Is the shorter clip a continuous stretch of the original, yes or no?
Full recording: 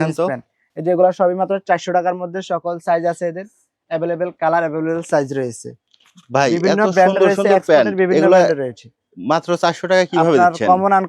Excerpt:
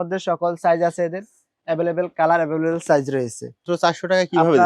no